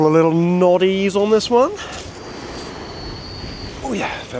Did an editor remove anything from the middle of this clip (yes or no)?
yes